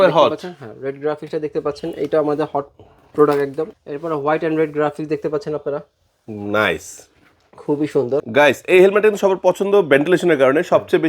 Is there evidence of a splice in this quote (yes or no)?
yes